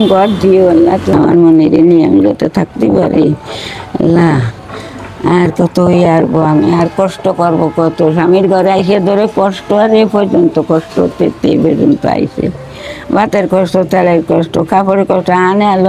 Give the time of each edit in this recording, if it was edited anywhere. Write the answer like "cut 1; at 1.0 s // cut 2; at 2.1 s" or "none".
cut 1; at 1.1 s